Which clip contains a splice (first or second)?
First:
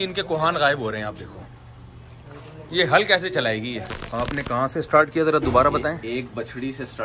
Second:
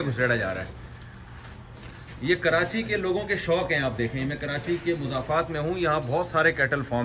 first